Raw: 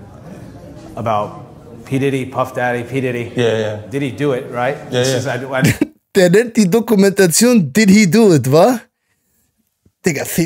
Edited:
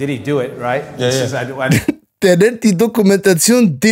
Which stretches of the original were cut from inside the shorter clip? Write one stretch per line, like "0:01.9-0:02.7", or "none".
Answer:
none

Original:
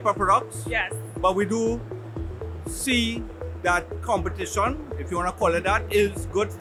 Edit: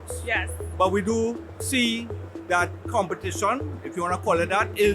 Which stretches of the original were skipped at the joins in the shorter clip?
0:02.0-0:02.7

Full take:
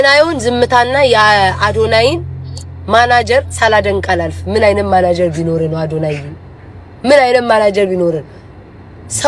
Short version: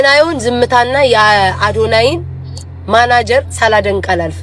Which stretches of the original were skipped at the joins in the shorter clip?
none

